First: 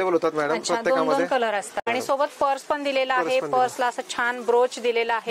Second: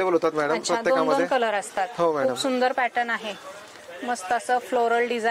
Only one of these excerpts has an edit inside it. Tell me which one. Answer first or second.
first